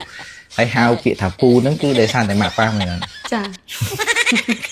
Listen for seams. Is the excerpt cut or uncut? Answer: uncut